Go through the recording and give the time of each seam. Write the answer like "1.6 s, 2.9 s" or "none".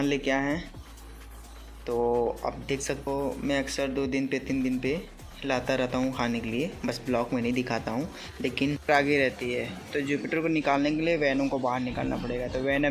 3.1 s, 8.9 s